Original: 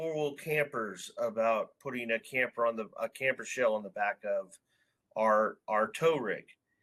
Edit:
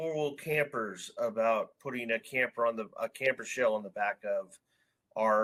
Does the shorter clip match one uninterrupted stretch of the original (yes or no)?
yes